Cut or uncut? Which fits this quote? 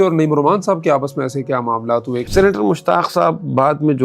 cut